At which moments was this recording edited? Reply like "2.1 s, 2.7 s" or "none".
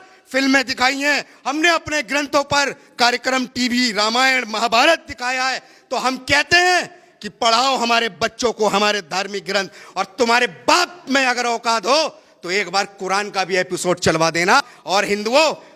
14.7 s